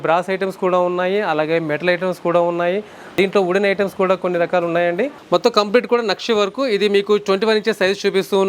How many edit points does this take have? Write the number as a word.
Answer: two